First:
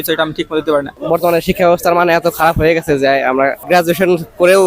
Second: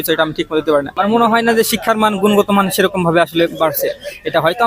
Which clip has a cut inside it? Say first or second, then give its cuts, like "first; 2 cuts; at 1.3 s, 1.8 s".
first; 2 cuts; at 0.9 s, 3.6 s